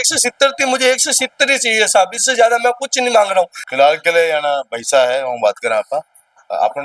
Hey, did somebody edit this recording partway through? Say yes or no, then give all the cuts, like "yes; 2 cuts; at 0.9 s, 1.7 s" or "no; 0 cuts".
no; 0 cuts